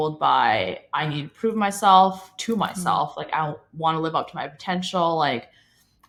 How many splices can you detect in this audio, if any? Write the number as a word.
zero